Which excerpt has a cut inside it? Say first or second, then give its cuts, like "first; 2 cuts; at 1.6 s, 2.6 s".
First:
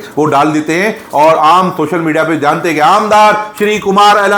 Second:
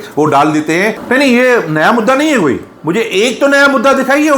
second; 1 cut; at 1.0 s